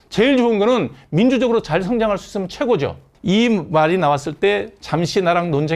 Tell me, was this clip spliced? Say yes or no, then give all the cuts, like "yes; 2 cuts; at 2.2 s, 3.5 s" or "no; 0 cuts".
yes; 1 cut; at 3.1 s